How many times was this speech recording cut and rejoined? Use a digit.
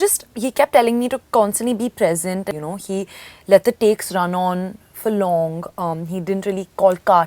1